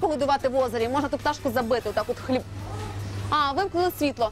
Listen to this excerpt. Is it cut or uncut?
uncut